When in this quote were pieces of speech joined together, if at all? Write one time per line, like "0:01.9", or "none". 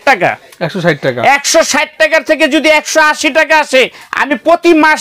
none